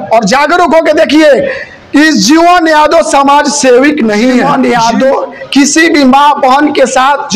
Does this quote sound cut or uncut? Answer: cut